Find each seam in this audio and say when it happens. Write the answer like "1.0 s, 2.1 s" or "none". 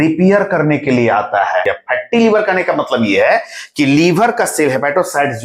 1.6 s